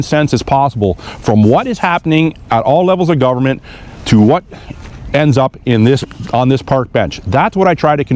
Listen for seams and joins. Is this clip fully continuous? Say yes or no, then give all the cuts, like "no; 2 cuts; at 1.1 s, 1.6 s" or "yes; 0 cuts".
yes; 0 cuts